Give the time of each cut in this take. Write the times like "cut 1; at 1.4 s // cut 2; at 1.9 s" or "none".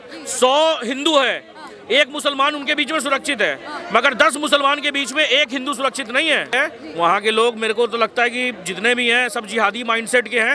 cut 1; at 6.5 s